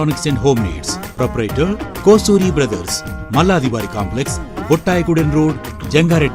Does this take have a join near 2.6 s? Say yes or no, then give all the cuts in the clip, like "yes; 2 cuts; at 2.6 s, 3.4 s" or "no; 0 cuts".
no; 0 cuts